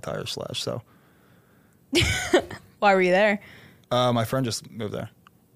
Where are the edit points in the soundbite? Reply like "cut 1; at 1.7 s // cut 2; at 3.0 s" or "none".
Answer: none